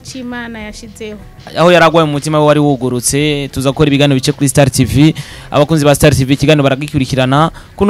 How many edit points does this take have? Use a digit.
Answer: 1